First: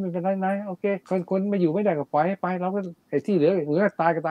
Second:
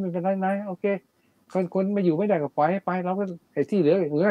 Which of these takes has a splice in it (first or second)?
first